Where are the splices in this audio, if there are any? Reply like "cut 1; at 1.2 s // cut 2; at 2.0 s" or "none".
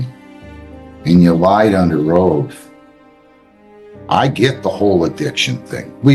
none